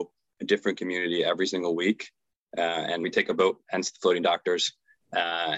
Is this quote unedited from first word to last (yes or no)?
no